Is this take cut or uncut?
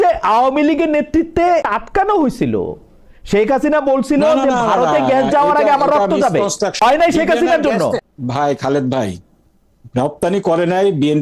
cut